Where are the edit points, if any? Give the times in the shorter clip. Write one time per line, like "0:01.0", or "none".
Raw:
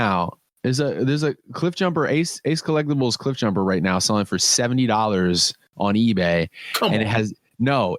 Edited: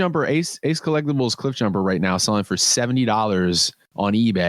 none